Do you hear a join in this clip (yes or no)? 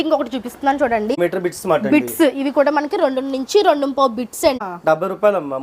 yes